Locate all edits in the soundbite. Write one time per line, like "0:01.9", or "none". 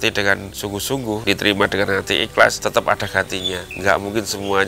0:01.2